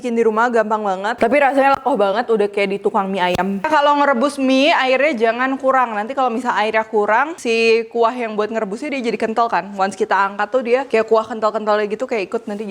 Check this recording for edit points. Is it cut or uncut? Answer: cut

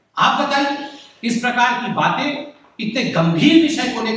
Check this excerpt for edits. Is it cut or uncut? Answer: uncut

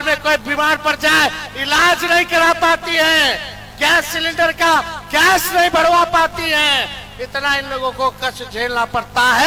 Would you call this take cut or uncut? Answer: uncut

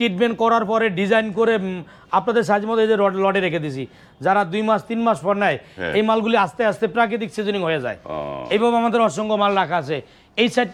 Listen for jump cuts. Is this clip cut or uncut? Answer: uncut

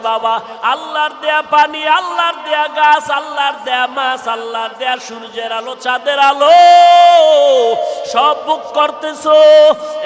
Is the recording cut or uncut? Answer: uncut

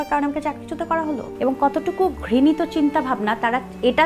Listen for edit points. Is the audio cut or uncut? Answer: cut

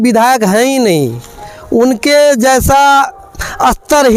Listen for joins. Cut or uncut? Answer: uncut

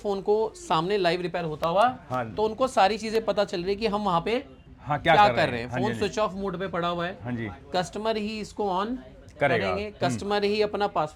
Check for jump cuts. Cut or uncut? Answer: uncut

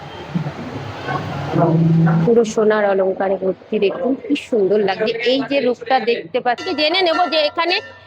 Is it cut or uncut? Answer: cut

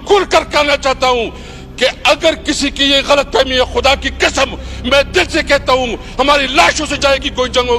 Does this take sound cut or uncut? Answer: uncut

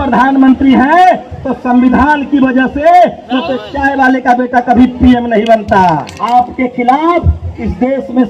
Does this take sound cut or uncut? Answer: cut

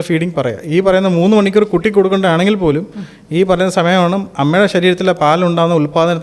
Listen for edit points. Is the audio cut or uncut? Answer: uncut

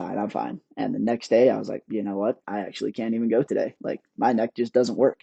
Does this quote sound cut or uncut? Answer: uncut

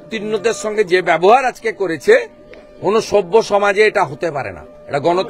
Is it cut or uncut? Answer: uncut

